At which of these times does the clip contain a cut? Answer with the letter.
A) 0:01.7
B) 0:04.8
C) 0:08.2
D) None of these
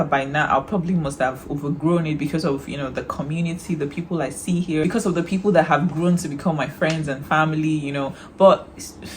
B